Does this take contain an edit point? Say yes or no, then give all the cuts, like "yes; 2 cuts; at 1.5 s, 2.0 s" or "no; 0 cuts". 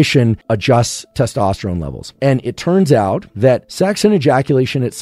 yes; 1 cut; at 3.6 s